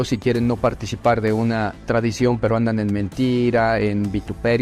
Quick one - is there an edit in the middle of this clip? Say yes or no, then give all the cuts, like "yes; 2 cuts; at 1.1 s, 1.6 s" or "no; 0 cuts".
yes; 1 cut; at 1.8 s